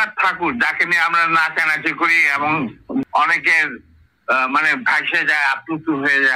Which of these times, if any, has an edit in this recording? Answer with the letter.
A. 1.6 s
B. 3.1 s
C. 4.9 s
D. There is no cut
B